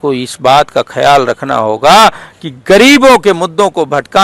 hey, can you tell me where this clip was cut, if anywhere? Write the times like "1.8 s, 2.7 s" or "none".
none